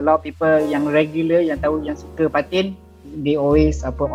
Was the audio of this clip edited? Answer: no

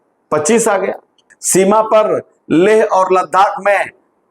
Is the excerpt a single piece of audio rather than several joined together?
no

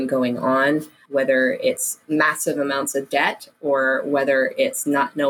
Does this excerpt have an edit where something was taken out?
yes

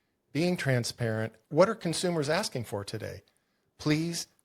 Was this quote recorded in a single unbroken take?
no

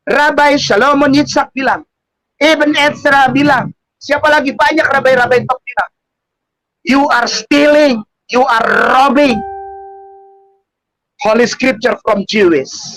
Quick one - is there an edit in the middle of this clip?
no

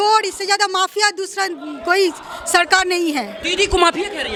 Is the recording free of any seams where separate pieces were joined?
yes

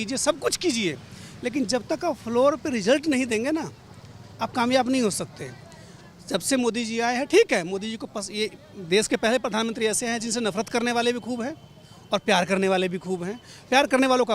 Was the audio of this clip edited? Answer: no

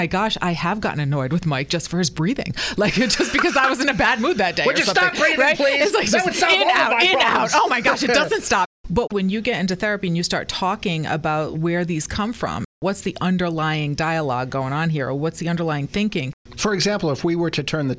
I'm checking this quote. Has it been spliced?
yes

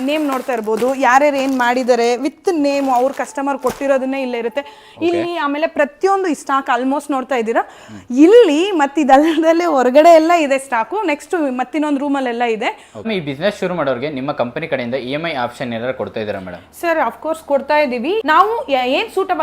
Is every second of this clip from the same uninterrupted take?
no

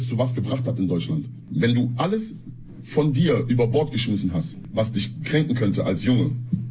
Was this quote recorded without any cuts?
no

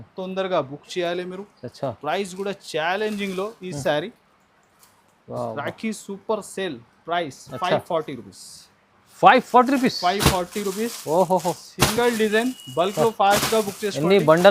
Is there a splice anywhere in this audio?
no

